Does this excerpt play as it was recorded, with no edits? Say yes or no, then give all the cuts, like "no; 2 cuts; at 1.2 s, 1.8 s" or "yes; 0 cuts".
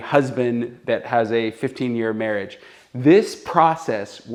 yes; 0 cuts